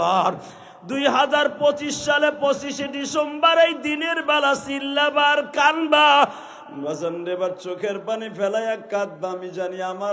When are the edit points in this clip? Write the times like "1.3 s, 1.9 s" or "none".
6.5 s